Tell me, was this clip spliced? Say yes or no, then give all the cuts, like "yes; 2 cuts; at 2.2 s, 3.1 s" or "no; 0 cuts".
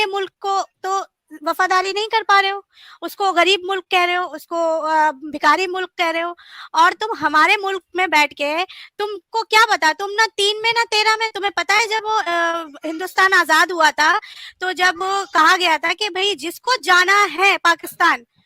no; 0 cuts